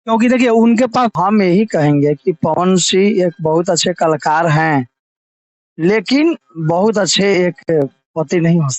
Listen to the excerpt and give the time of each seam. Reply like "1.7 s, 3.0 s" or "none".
1.1 s